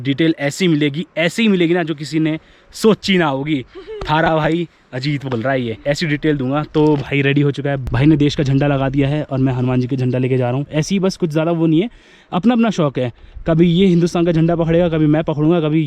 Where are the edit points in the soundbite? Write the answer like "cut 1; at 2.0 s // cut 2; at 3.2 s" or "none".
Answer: none